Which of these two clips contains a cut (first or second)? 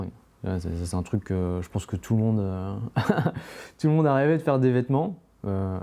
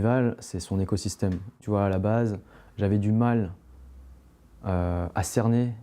second